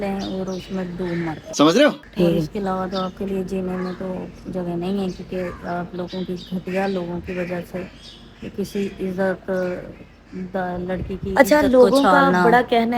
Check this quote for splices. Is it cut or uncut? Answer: uncut